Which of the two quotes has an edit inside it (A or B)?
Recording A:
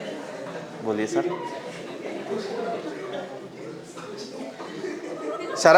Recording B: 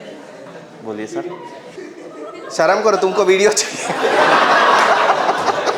B